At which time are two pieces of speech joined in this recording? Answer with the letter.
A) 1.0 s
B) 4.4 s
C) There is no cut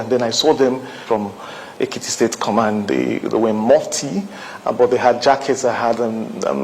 A